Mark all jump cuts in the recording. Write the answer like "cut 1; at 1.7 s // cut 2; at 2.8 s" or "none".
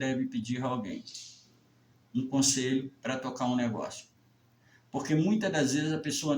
none